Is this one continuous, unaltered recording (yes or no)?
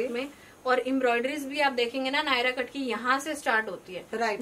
yes